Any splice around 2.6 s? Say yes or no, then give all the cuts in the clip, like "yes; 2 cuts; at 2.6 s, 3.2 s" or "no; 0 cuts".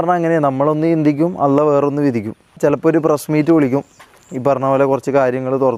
yes; 1 cut; at 2.6 s